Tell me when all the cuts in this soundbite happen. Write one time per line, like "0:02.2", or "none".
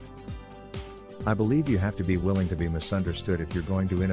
0:01.3